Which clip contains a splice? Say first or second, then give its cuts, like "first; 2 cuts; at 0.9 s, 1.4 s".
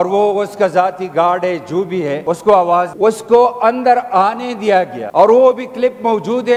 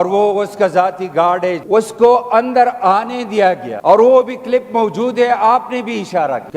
second; 1 cut; at 1.6 s